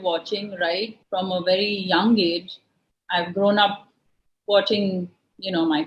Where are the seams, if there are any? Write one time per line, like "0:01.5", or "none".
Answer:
0:01.0